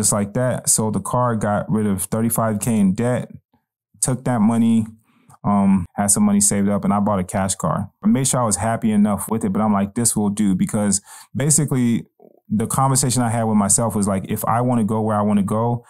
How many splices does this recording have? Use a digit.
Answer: 2